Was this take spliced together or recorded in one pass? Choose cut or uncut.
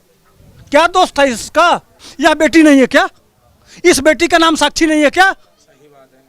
cut